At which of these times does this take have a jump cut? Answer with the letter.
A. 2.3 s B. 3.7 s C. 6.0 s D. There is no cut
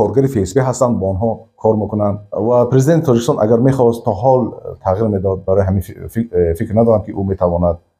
A